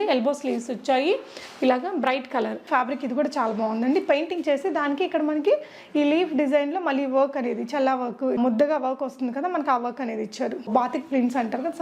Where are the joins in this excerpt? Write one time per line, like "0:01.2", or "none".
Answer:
0:02.7
0:10.7